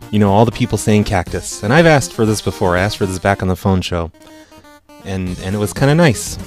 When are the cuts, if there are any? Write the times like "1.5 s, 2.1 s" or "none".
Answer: 3.4 s